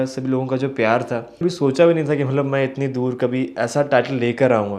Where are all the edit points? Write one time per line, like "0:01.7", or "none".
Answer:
0:01.4

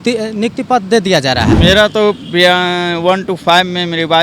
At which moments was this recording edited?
0:01.5

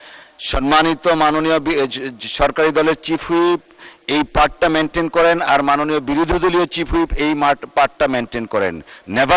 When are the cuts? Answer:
none

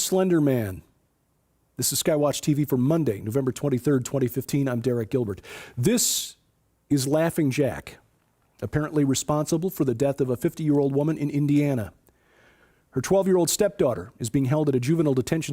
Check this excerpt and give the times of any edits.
none

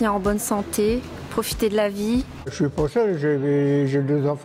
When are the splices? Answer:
0:02.5

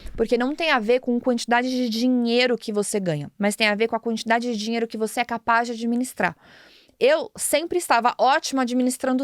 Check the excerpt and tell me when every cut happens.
none

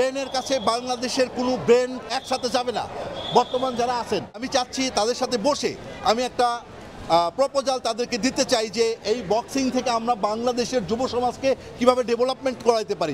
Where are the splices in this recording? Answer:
0:02.1
0:04.4

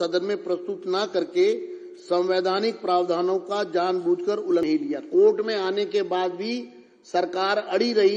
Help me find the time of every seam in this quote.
0:04.6

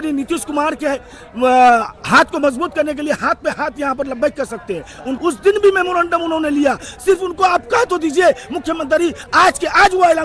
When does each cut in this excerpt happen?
0:05.1

